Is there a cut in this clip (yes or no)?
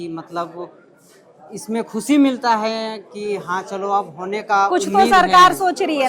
no